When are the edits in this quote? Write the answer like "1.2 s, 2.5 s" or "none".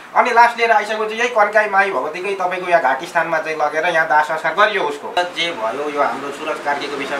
5.2 s